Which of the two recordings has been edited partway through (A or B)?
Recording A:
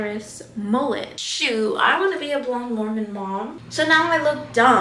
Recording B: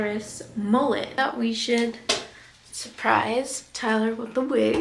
A